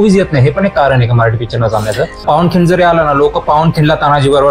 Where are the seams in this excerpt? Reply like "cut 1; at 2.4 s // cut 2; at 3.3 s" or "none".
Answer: cut 1; at 2.2 s